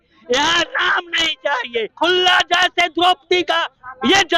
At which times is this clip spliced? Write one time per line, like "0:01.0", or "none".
0:01.9